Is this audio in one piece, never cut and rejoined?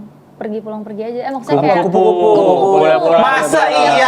yes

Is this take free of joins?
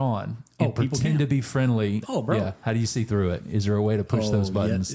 no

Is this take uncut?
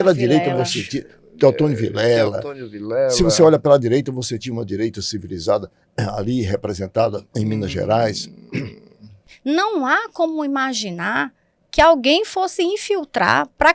no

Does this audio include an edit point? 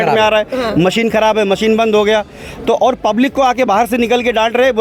no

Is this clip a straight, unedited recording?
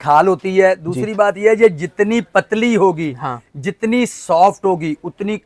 yes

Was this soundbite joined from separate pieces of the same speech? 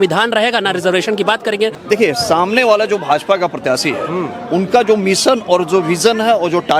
yes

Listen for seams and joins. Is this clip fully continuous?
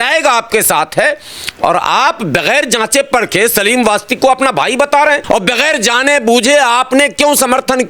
no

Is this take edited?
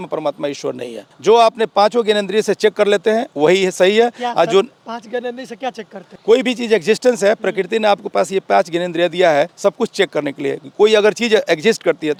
no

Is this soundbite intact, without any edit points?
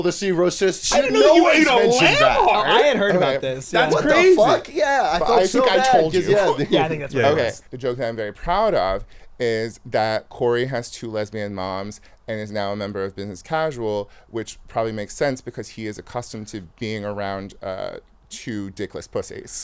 no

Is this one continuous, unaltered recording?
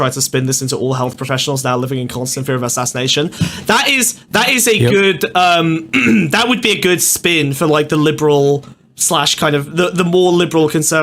yes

